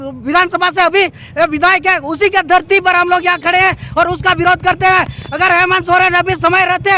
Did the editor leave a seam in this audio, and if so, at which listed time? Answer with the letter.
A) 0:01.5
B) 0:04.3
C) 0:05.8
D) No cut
D